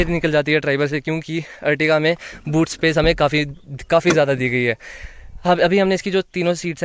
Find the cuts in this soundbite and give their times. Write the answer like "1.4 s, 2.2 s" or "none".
none